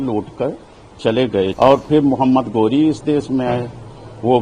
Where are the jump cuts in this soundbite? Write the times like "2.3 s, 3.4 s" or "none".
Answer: 1.5 s